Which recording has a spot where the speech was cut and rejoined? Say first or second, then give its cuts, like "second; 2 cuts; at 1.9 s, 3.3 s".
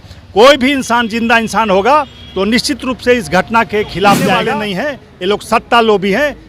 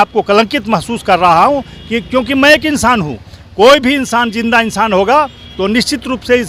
first; 1 cut; at 4.5 s